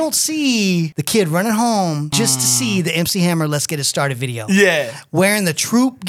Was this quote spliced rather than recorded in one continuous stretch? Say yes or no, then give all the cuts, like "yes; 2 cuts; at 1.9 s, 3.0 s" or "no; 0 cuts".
yes; 2 cuts; at 1.0 s, 2.1 s